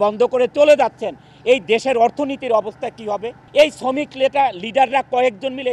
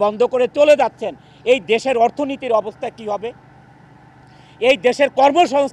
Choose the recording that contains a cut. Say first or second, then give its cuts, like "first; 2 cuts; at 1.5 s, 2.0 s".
first; 1 cut; at 3.4 s